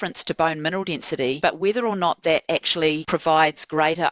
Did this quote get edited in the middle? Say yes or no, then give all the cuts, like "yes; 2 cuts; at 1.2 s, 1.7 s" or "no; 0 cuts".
yes; 2 cuts; at 1.4 s, 3.0 s